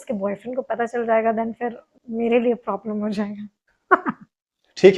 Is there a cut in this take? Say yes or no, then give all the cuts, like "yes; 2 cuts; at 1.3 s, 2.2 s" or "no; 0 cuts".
no; 0 cuts